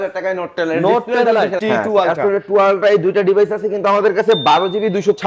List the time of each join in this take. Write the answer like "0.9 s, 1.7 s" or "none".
1.6 s